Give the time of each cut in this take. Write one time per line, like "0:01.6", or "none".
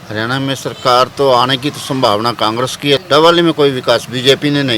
0:03.0